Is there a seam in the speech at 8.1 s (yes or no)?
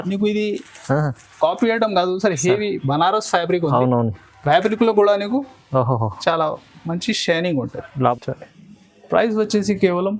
yes